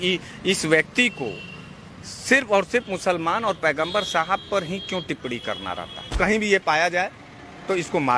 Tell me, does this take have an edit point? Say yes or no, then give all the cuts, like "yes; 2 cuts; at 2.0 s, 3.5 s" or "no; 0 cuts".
yes; 1 cut; at 6.1 s